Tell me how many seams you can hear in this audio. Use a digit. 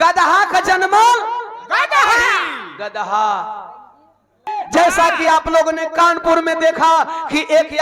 1